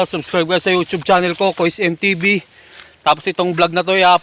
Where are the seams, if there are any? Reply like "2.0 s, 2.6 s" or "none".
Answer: none